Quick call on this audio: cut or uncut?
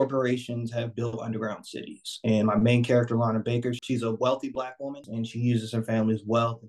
cut